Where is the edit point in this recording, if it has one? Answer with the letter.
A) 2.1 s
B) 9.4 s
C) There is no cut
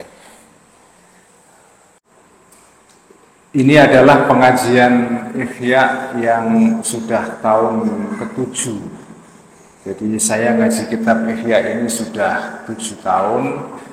A